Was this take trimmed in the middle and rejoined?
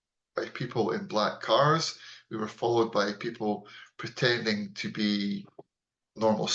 no; 0 cuts

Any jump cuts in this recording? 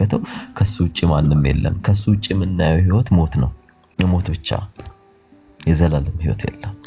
no; 0 cuts

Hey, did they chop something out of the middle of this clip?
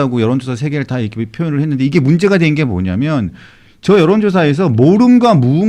no; 0 cuts

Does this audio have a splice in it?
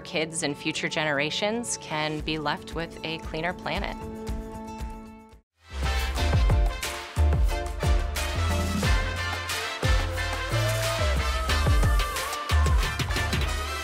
no; 0 cuts

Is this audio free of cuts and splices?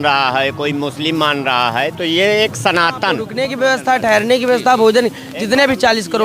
no; 1 cut; at 3.3 s

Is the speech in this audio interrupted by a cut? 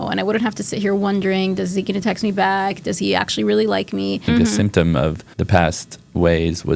yes; 2 cuts; at 4.2 s, 5.3 s

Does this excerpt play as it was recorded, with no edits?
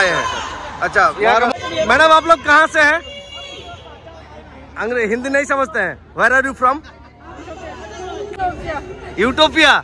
no; 2 cuts; at 1.5 s, 8.3 s

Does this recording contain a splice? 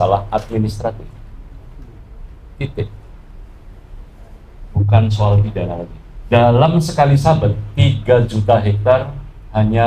no; 0 cuts

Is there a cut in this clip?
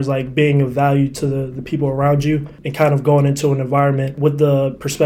yes; 1 cut; at 4.1 s

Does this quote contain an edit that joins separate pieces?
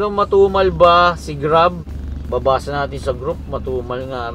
yes; 1 cut; at 1.8 s

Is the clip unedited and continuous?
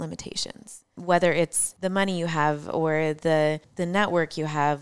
no; 3 cuts; at 0.9 s, 1.6 s, 3.7 s

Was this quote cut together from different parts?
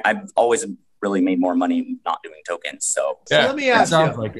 yes; 1 cut; at 3.2 s

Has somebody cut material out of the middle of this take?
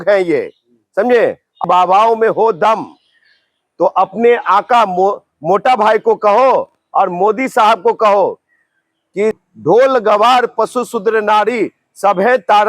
yes; 2 cuts; at 1.6 s, 9.4 s

